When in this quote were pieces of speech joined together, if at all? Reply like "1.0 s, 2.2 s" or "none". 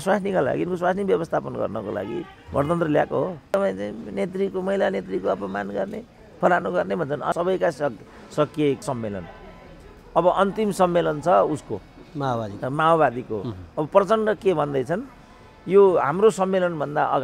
3.5 s, 7.3 s, 8.8 s